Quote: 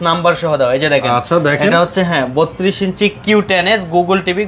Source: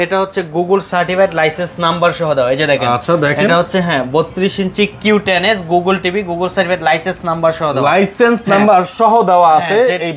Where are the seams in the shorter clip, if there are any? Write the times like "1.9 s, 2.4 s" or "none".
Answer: none